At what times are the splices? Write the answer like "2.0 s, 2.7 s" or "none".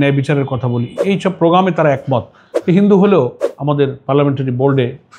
3.5 s